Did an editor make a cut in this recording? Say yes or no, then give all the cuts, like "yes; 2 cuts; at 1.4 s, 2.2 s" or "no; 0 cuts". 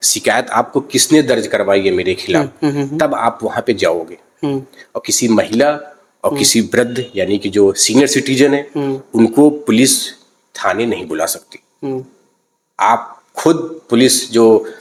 no; 0 cuts